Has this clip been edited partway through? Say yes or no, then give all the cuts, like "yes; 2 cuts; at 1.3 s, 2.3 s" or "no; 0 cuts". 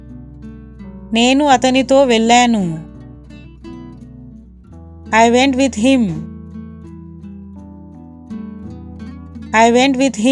yes; 5 cuts; at 1.1 s, 2.8 s, 5.1 s, 6.9 s, 9.5 s